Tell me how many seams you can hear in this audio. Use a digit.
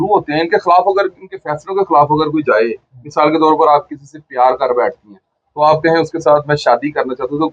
0